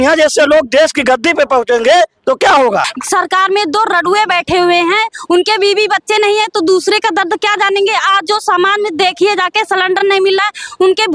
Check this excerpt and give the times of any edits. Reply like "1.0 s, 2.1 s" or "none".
2.9 s